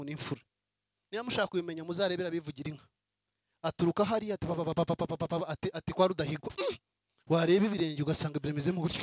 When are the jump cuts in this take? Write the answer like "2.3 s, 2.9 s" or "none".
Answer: none